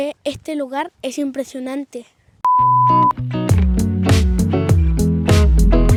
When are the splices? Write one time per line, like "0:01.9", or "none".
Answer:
none